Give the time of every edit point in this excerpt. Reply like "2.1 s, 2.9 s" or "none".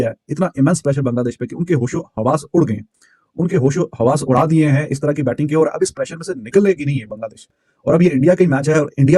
none